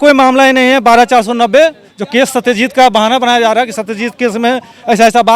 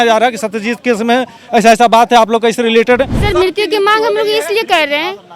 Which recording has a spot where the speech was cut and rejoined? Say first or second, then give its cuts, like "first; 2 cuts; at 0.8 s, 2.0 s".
second; 1 cut; at 3.2 s